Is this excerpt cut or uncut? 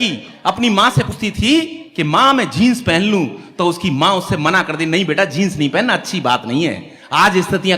cut